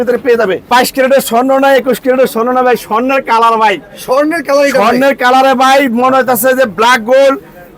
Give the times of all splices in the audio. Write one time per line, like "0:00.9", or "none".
none